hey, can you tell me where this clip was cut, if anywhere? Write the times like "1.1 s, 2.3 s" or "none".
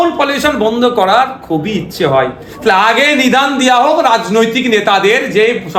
none